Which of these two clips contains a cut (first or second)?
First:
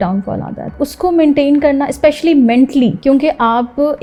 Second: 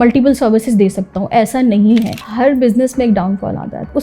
second